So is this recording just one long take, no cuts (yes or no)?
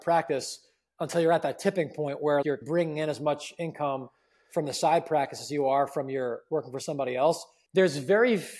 no